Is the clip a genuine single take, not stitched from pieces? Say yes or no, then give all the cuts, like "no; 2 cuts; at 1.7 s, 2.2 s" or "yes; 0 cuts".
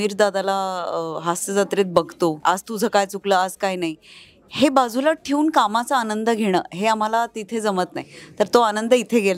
no; 1 cut; at 2.4 s